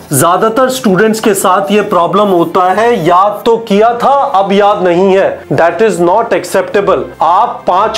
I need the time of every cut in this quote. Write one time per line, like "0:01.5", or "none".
0:05.4
0:07.1